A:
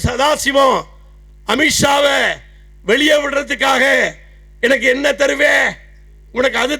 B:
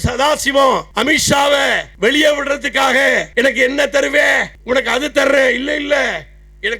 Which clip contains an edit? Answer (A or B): B